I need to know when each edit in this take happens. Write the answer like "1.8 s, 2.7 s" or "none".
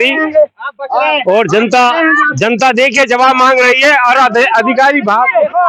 none